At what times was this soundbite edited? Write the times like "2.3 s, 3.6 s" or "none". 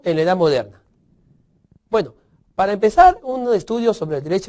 2.5 s